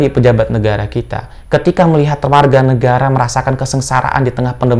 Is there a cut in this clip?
no; 0 cuts

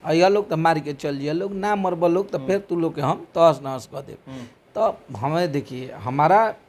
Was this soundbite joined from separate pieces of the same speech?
no; 0 cuts

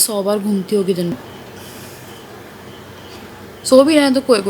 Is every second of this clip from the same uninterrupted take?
no; 1 cut; at 1.1 s

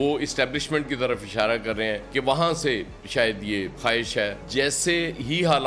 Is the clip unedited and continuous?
no; 1 cut; at 4.4 s

